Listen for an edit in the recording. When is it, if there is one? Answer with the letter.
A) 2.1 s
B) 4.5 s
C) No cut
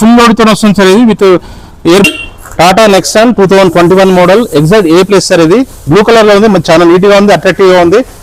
A